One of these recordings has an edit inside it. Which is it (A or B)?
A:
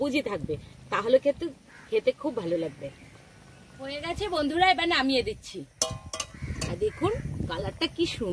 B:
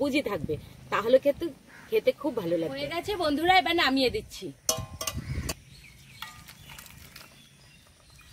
B